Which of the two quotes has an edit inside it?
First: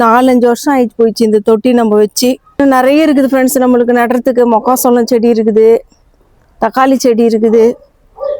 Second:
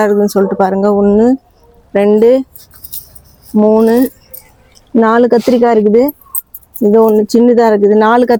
first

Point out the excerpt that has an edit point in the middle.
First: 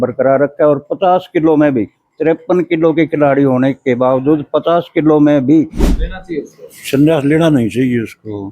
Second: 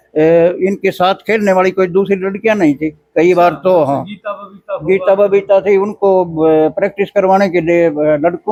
first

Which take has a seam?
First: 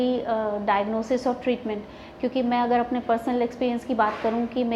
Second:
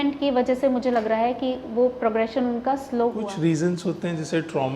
second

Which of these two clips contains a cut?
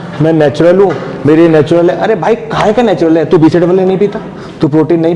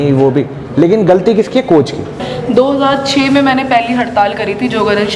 second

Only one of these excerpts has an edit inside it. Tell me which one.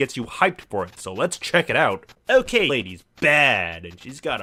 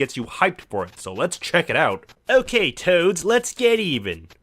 second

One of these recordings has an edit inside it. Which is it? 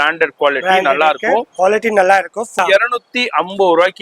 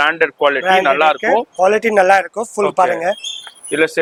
first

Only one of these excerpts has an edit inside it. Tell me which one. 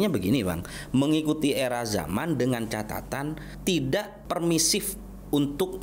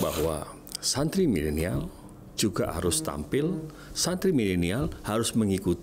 first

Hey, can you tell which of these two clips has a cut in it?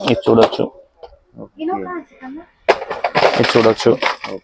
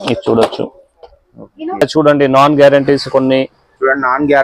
second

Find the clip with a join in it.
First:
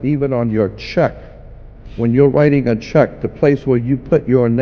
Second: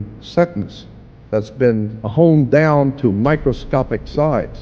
second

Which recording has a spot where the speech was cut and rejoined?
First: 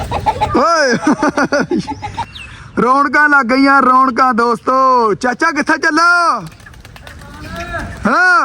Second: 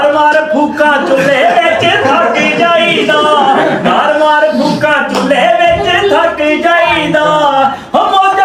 first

